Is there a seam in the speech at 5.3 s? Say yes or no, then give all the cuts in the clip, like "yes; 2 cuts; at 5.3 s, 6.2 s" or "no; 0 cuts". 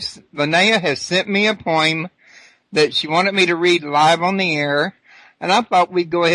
no; 1 cut; at 3.2 s